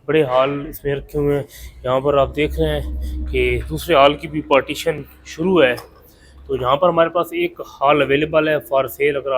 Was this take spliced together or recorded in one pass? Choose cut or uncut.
uncut